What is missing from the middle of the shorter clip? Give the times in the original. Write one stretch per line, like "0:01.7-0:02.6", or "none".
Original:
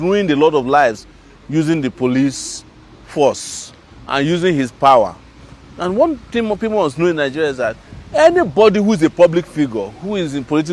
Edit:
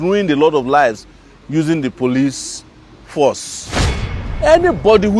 0:04.1-0:07.8